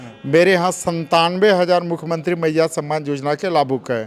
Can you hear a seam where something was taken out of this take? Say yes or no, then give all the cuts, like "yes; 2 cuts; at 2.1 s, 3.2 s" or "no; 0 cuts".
no; 0 cuts